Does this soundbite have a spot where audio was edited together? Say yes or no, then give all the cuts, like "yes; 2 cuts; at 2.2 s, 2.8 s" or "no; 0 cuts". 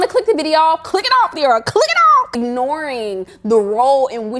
yes; 1 cut; at 2.4 s